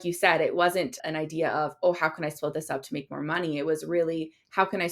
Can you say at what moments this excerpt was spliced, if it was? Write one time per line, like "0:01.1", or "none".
0:01.0